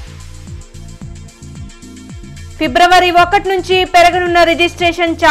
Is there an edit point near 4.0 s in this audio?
no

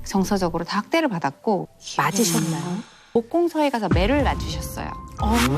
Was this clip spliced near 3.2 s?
yes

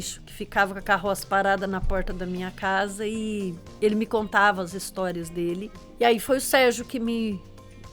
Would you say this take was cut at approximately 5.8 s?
yes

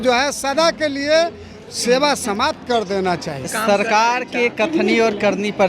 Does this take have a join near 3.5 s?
yes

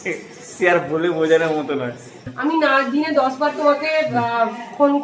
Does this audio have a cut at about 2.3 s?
yes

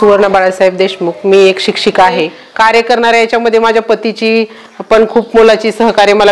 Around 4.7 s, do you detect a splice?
no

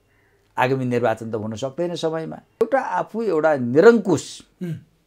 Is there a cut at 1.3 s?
no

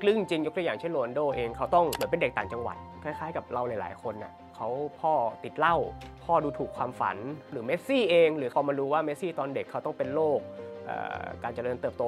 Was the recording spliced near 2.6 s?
no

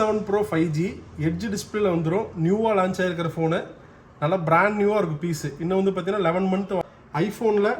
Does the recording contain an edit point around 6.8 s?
yes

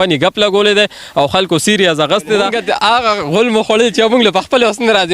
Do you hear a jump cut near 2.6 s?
yes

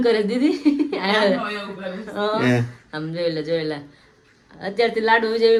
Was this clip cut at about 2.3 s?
no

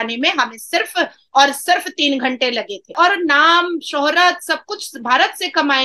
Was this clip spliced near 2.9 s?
yes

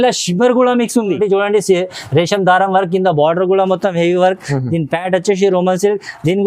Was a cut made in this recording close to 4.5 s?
no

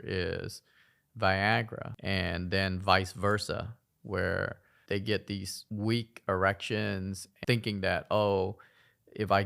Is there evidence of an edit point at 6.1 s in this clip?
no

